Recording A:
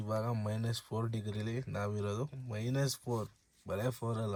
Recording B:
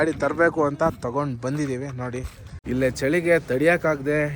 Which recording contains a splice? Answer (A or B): B